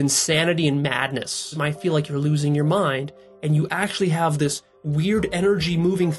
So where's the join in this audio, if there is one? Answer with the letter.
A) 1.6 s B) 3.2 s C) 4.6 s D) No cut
A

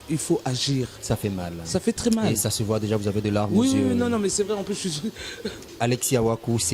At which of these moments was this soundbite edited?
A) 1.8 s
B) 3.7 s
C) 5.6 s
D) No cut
C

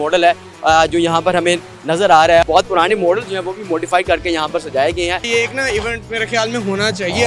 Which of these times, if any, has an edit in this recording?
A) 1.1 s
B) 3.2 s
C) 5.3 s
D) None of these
C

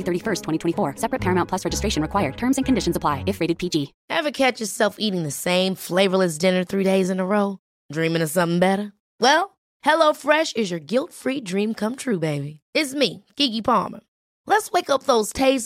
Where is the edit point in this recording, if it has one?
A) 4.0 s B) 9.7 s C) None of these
A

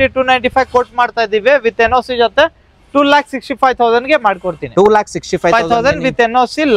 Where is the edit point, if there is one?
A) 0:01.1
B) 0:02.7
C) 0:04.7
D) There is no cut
D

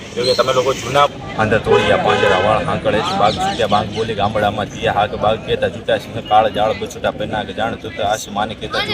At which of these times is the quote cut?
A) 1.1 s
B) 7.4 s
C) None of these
A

